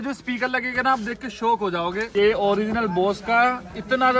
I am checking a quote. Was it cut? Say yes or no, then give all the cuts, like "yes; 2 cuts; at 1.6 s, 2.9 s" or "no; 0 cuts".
yes; 1 cut; at 2.0 s